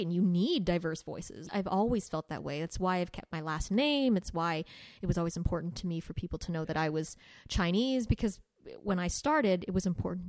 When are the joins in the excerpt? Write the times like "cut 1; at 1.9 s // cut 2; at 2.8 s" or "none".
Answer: cut 1; at 1.4 s

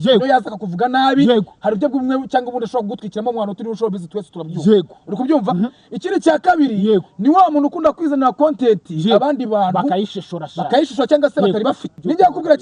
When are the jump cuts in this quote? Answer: none

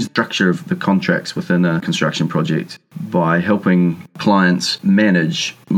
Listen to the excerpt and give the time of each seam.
none

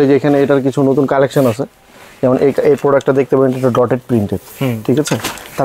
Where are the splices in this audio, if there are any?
none

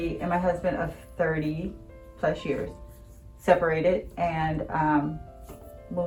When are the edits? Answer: none

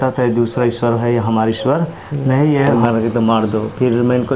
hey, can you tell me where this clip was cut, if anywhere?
cut 1; at 2.7 s

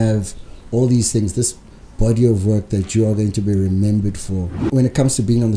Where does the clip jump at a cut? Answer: cut 1; at 4.6 s

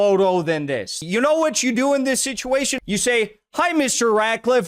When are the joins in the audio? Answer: cut 1; at 0.9 s // cut 2; at 2.7 s

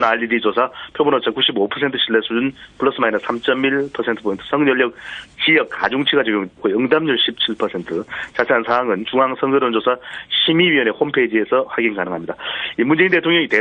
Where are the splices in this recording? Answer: cut 1; at 2.9 s

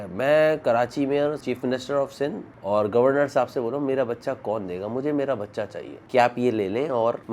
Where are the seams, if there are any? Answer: cut 1; at 1.4 s // cut 2; at 6.0 s

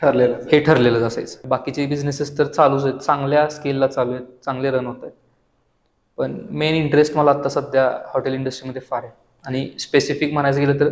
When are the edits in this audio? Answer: cut 1; at 1.3 s

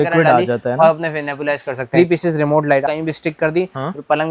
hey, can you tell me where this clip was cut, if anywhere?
cut 1; at 1.8 s // cut 2; at 2.8 s

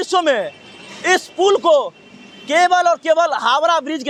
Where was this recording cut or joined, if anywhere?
none

